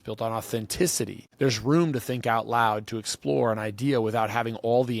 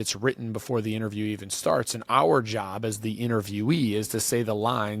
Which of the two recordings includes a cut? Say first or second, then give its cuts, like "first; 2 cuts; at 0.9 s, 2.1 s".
first; 1 cut; at 1.2 s